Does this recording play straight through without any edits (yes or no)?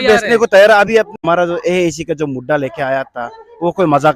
no